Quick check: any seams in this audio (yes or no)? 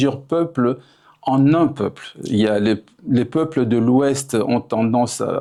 no